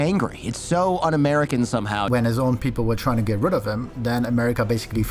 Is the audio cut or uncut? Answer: cut